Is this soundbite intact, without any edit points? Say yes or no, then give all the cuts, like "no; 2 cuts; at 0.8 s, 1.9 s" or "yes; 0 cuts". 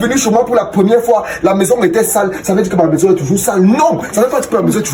yes; 0 cuts